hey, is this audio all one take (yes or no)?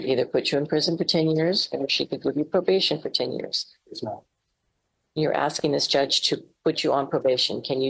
yes